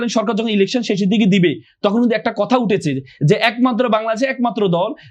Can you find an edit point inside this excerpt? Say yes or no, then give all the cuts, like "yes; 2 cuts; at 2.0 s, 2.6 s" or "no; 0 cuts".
no; 0 cuts